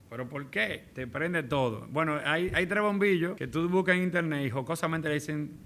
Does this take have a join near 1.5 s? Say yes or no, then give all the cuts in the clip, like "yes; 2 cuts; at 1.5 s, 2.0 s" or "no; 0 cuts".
no; 1 cut; at 3.4 s